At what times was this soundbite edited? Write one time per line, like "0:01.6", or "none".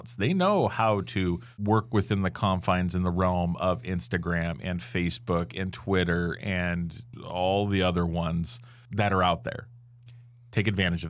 none